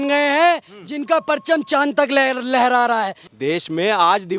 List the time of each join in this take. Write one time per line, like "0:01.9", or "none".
0:03.2